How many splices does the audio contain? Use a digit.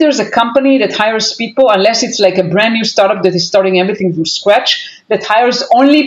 0